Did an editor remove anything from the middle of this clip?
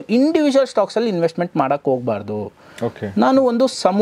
no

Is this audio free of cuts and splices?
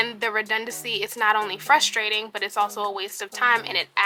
yes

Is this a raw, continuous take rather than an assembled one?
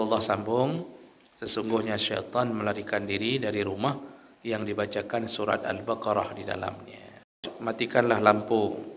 no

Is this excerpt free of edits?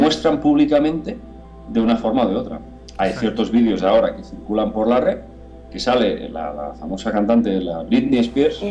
yes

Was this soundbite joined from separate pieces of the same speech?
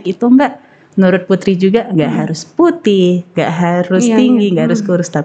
no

